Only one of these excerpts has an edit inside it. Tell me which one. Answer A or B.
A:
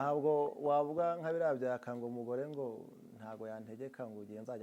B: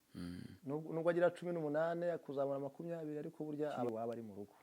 B